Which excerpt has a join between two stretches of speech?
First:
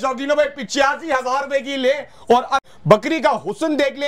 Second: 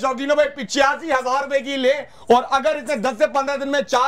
first; 1 cut; at 2.6 s

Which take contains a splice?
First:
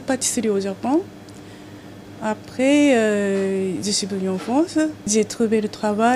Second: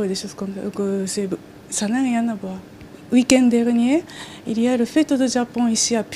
second; 1 cut; at 3.7 s

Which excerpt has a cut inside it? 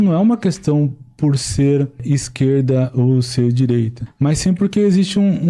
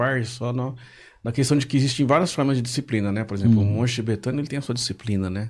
first; 2 cuts; at 2.0 s, 4.0 s

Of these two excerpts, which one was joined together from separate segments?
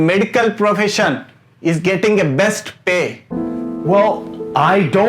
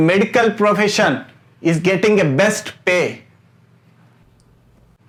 first; 1 cut; at 3.2 s

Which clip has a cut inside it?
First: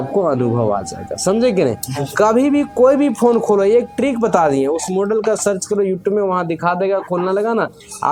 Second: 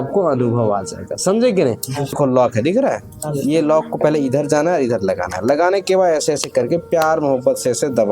second; 1 cut; at 2.1 s

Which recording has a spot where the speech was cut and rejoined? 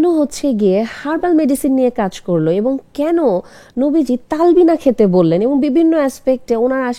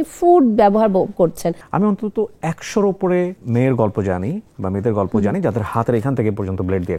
second; 2 cuts; at 1.6 s, 3.4 s

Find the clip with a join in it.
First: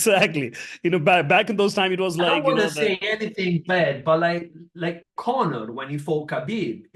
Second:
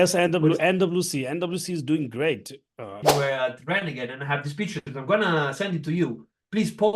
second; 1 cut; at 3.0 s

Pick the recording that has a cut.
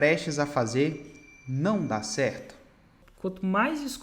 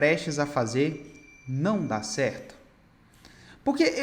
first; 1 cut; at 3.0 s

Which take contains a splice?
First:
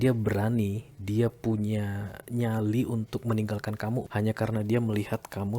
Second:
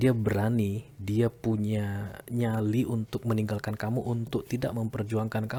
first; 1 cut; at 4.1 s

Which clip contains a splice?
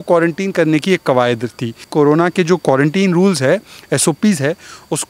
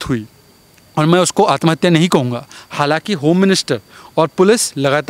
first; 1 cut; at 1.9 s

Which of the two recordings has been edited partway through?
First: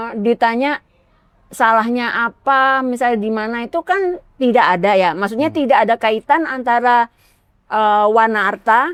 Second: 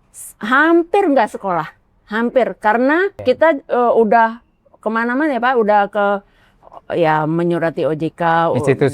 second; 1 cut; at 3.2 s

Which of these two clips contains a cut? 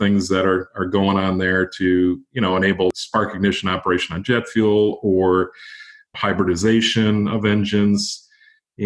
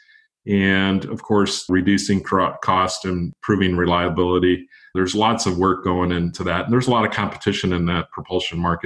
second; 4 cuts; at 1.7 s, 3.3 s, 4.8 s, 6.3 s

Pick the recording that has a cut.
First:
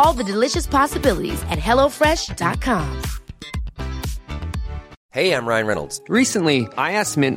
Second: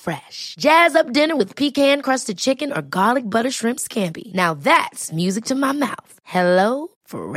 first; 1 cut; at 5.0 s

